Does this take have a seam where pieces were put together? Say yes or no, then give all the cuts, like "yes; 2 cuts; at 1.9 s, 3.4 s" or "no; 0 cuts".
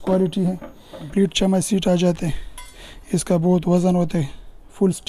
yes; 1 cut; at 1.1 s